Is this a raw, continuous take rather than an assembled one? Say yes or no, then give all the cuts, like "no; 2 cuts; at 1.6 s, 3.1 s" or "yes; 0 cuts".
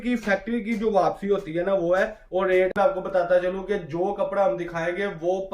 no; 1 cut; at 2.7 s